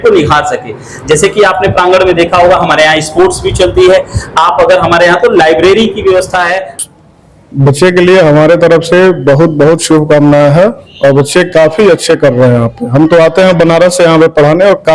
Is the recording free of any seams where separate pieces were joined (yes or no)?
no